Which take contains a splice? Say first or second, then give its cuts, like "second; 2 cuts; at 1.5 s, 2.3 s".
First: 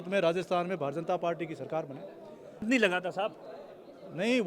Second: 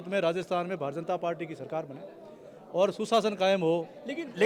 first; 1 cut; at 2.6 s